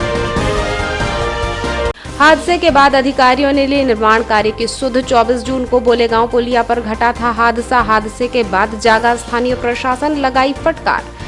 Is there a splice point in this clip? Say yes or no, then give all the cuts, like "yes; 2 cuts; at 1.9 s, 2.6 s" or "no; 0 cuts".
yes; 1 cut; at 1.9 s